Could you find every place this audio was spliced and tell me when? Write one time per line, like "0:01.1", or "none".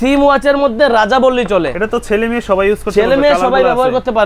0:01.8